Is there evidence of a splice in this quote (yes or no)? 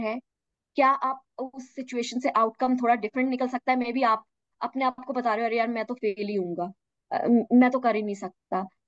no